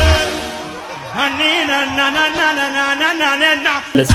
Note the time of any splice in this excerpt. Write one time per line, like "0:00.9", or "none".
none